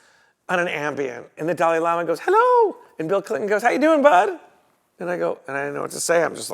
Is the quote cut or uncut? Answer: cut